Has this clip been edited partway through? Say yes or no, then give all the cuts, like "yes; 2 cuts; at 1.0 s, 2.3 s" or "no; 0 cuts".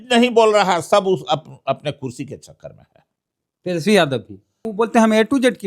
yes; 1 cut; at 4.7 s